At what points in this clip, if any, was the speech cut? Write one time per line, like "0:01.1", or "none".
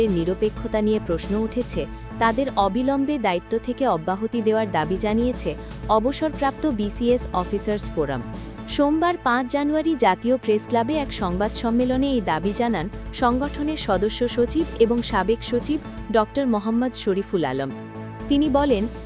none

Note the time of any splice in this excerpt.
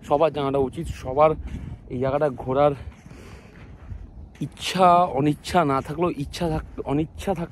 none

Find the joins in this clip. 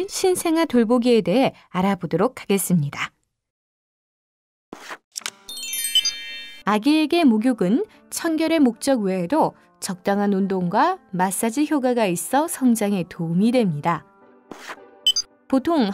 0:08.5

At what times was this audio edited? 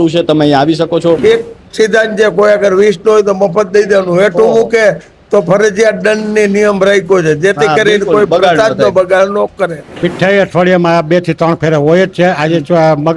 0:01.2
0:09.9

